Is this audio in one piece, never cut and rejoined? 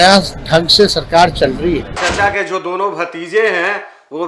no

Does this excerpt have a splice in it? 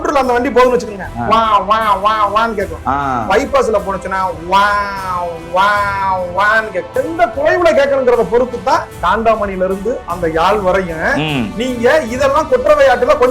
yes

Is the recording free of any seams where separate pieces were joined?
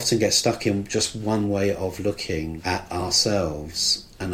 no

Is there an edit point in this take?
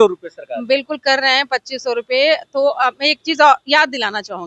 no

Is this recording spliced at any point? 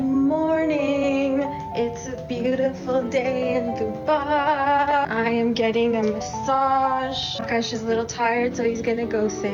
no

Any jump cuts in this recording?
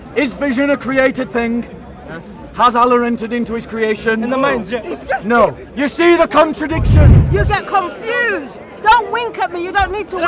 yes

